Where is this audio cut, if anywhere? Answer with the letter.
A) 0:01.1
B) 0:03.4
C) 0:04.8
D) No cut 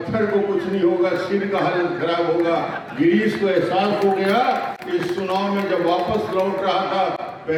D